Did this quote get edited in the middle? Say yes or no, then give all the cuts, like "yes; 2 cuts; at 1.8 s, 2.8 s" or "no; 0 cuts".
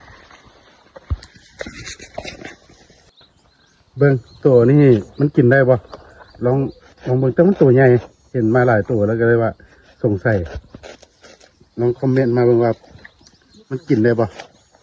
yes; 1 cut; at 3.1 s